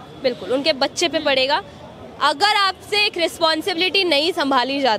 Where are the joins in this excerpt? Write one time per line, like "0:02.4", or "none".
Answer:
none

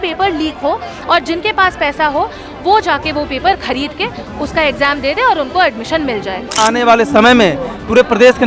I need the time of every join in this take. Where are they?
0:06.5

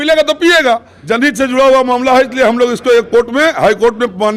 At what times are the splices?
0:00.9

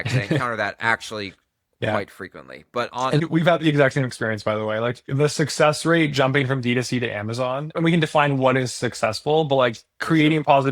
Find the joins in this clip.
0:03.2
0:05.1
0:07.7

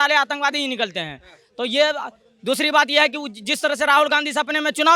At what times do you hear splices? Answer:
none

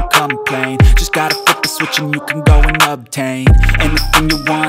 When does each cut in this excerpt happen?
none

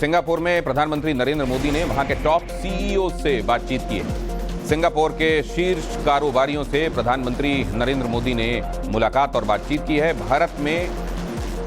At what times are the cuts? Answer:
0:08.7

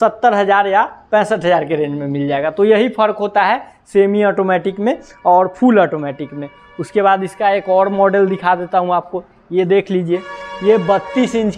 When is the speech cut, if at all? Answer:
none

